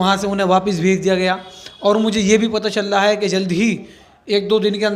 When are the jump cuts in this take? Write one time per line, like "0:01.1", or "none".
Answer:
none

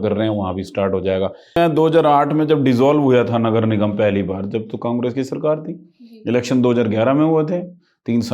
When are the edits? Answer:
0:01.5

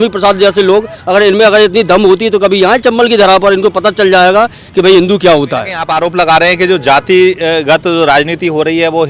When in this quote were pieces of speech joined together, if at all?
0:05.8

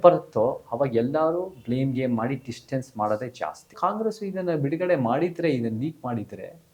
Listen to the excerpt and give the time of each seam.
0:03.7

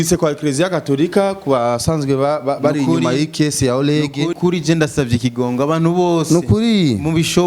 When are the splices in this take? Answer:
0:04.3

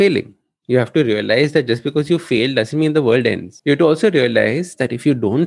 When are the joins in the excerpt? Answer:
0:03.5

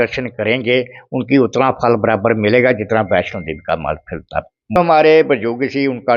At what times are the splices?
0:04.8

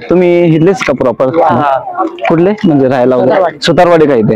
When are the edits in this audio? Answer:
none

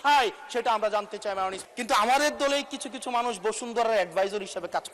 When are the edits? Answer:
0:01.6

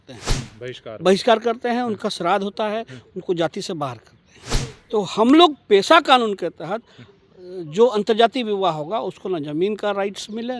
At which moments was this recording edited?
none

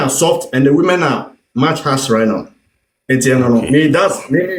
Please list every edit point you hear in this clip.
none

